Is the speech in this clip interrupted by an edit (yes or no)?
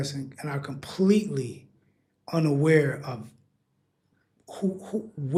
no